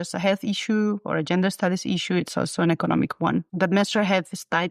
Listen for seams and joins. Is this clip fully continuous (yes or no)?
no